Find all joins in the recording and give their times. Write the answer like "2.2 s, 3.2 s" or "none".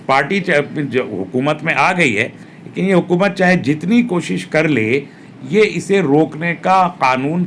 none